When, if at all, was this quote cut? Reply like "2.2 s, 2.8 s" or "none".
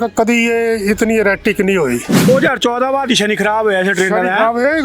2.3 s